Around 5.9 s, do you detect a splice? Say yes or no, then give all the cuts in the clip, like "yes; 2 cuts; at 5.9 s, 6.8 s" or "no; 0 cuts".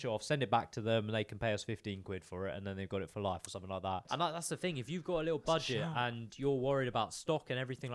no; 1 cut; at 4.0 s